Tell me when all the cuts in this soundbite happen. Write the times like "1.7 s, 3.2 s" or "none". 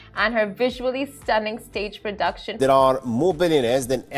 2.5 s